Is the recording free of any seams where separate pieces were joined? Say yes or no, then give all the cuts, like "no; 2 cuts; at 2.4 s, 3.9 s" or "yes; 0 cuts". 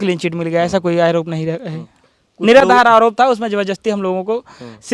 yes; 0 cuts